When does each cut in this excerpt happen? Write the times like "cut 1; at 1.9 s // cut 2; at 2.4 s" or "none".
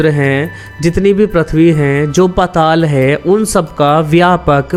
none